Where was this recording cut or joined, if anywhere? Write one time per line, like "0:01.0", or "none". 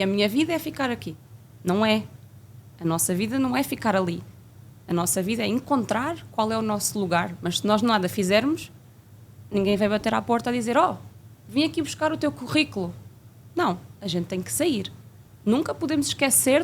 0:15.2